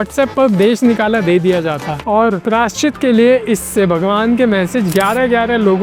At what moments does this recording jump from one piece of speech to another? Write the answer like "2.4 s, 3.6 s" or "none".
none